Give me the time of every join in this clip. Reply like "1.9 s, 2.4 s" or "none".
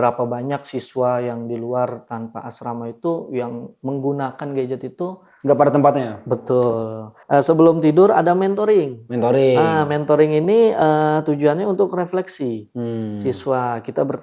7.2 s